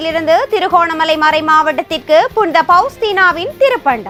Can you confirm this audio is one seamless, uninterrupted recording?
yes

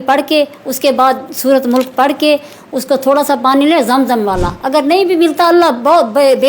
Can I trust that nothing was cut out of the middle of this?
yes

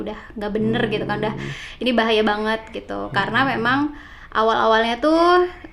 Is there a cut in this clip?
no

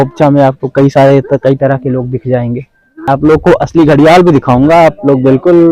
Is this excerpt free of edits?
no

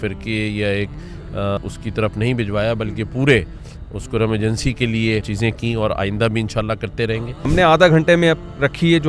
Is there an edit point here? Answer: yes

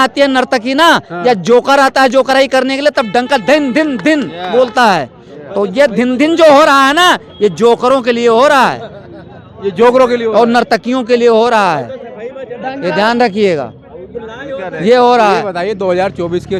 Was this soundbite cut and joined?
no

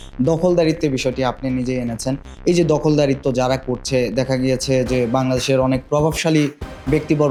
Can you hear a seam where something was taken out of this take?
no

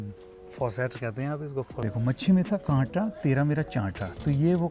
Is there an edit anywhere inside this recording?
yes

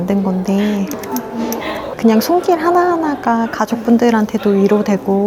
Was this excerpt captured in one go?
no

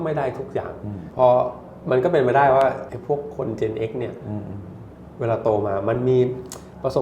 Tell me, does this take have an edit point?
yes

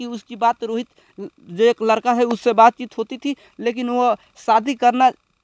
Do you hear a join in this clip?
no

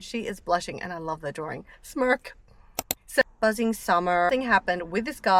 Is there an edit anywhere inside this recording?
yes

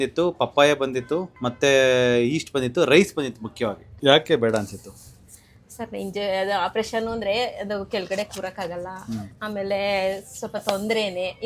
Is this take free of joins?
no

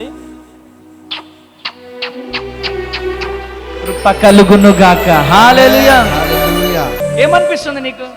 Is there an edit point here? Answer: yes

